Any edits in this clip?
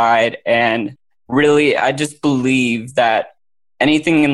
no; 0 cuts

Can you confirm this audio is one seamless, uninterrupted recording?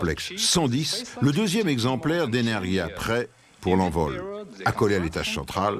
no; 1 cut; at 2.1 s

